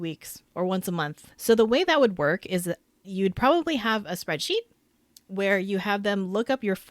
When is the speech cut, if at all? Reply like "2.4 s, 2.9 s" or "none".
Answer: 1.3 s, 3.1 s